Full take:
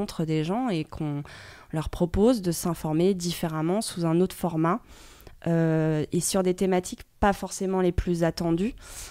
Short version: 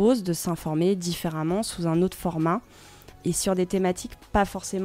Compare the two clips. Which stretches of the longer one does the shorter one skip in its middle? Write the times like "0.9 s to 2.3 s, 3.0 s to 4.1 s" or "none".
5.4 s to 6.1 s